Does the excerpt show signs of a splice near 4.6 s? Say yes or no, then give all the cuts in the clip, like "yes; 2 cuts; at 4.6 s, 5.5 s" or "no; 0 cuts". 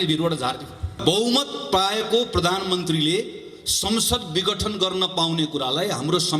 no; 1 cut; at 1.0 s